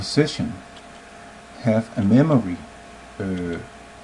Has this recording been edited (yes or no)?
no